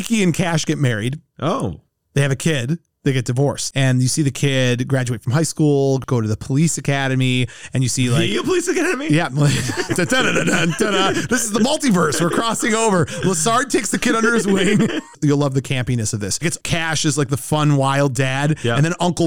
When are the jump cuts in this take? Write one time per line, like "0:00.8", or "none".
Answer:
0:03.7
0:06.0
0:15.1